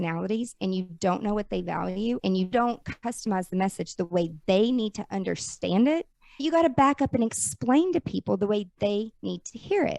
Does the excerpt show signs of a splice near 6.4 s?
yes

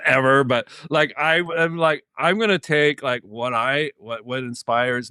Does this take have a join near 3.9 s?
no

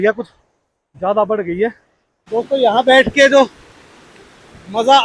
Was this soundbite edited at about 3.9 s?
no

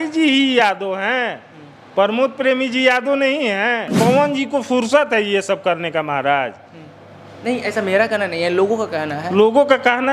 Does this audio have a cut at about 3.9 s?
yes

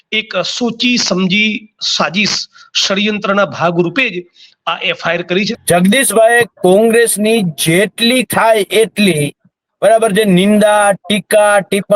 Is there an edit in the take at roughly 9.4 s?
no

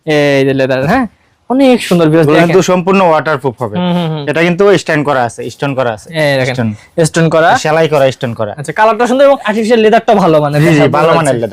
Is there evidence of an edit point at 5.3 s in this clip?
no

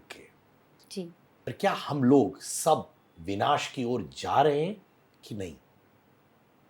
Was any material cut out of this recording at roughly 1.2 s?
yes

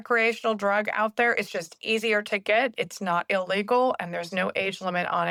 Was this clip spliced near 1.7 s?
no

